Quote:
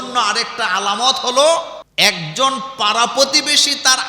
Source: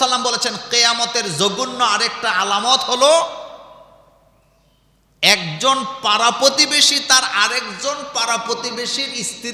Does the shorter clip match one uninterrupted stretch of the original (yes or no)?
no